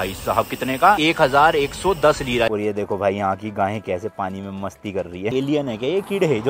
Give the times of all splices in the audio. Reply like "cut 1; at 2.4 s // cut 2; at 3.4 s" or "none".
cut 1; at 1.0 s // cut 2; at 2.5 s // cut 3; at 5.3 s